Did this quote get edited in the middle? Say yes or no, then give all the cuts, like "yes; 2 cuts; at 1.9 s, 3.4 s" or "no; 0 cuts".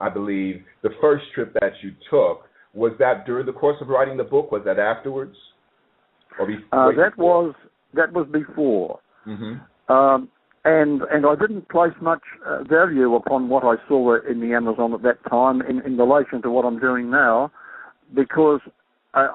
yes; 1 cut; at 18.2 s